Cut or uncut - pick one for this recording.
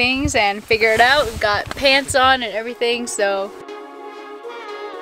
uncut